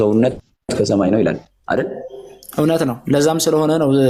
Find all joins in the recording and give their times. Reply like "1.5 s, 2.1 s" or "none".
none